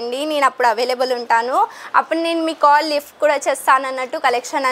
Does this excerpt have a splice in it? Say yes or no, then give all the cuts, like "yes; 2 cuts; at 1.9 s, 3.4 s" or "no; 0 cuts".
no; 0 cuts